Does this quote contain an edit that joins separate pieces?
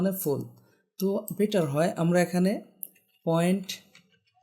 no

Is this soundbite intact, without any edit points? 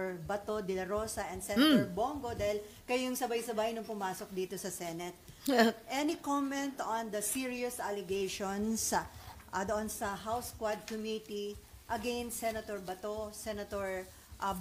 yes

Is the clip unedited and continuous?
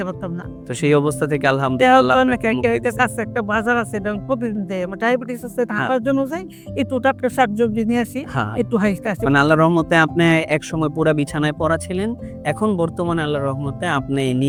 yes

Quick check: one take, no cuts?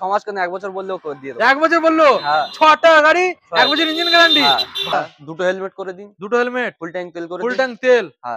no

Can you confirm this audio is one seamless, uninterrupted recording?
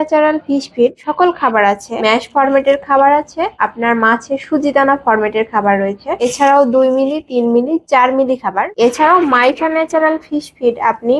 no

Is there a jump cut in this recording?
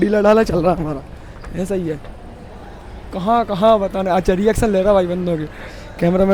no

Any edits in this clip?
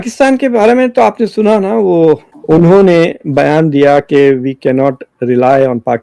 yes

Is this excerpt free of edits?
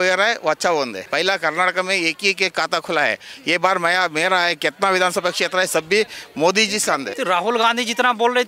no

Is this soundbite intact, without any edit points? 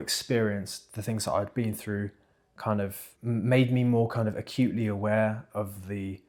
yes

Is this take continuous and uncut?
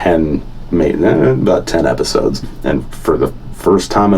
no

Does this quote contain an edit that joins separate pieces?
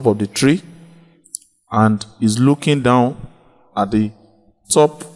no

